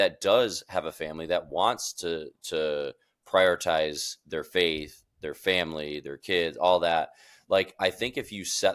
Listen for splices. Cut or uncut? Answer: uncut